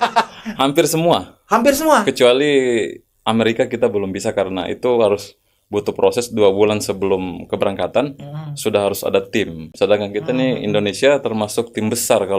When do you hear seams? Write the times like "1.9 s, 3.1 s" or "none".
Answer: none